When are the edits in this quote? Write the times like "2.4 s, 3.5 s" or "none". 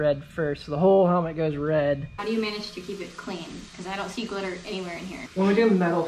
2.2 s, 5.2 s